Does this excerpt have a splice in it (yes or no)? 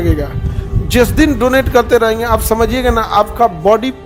no